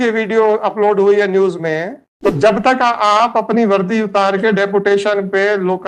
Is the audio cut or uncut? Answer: cut